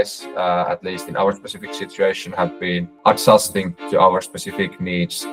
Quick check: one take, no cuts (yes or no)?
yes